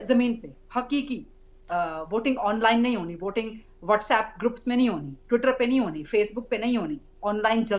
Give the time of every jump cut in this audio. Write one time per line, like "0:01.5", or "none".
none